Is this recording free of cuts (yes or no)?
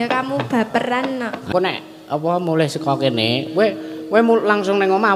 no